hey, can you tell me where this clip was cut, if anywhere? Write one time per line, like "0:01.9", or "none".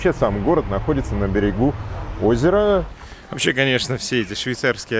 0:03.0

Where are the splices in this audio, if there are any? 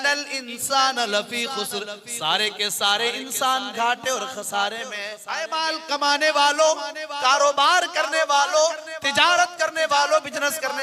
0:05.3

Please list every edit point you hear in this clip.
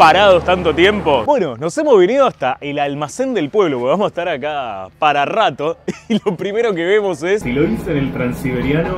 0:01.2
0:07.4

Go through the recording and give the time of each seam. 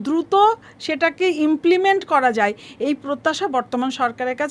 none

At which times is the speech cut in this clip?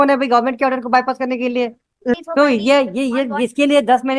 0:02.2

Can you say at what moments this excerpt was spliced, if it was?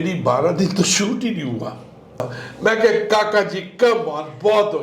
0:02.3

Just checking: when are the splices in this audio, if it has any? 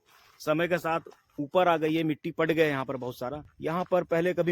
0:03.5

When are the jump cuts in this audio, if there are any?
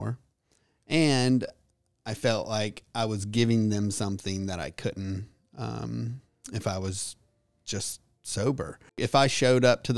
0:09.0

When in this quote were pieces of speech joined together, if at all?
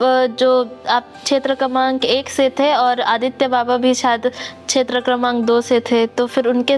none

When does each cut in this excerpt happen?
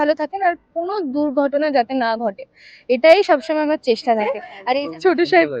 0:04.5

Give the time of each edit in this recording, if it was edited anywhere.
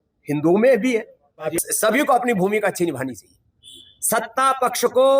0:01.6

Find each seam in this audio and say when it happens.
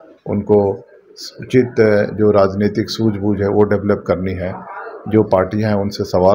none

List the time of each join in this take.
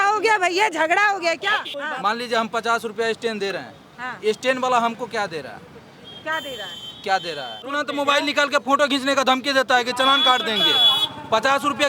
0:01.6
0:07.7

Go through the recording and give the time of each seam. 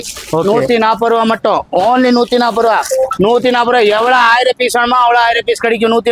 none

